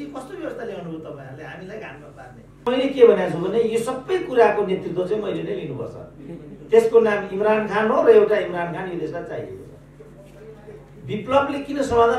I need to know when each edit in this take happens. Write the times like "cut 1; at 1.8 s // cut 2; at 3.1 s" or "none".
cut 1; at 2.6 s